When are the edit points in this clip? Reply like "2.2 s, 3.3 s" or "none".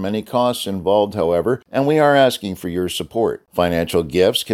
1.7 s